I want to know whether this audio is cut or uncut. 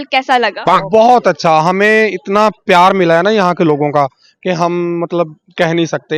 uncut